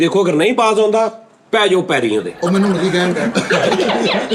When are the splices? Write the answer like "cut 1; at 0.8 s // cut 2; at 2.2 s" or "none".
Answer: none